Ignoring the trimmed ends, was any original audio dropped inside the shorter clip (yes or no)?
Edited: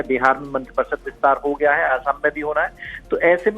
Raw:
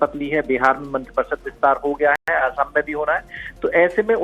yes